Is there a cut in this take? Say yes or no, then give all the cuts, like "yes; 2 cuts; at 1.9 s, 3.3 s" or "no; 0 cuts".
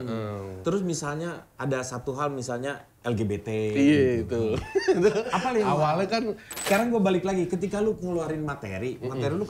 yes; 1 cut; at 6.5 s